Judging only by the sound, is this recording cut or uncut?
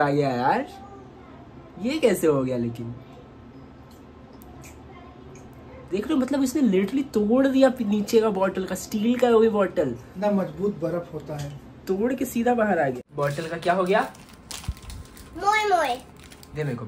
uncut